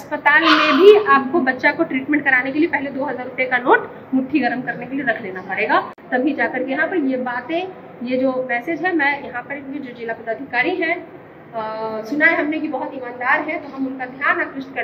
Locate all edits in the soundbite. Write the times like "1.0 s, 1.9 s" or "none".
none